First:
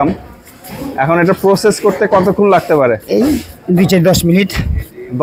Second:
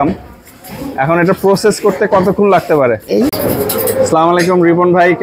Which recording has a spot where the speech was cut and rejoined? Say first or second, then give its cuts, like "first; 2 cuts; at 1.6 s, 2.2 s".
second; 1 cut; at 3.3 s